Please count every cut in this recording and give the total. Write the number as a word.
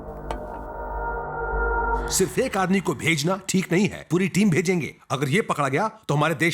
one